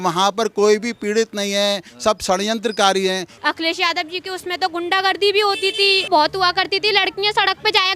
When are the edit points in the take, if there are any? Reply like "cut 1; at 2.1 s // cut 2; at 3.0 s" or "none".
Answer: cut 1; at 3.3 s // cut 2; at 6.1 s